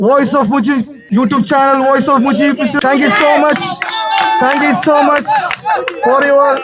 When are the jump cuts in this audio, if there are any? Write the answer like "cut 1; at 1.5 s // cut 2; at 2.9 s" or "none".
cut 1; at 1.0 s // cut 2; at 2.8 s